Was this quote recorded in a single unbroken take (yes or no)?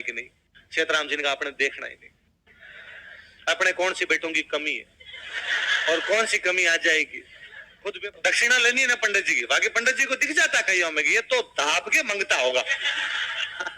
no